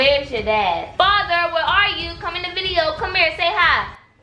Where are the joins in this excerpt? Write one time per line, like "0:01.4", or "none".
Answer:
0:00.9